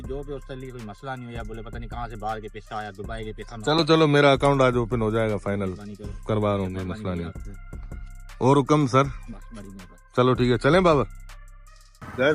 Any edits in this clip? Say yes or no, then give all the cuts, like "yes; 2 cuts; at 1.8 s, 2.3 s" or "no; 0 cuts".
no; 0 cuts